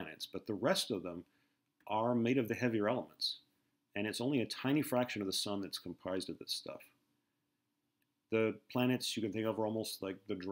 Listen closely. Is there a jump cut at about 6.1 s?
yes; 1 cut; at 6.1 s

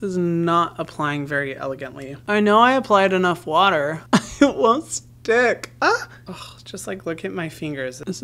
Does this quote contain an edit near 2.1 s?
yes; 2 cuts; at 2.1 s, 4.0 s

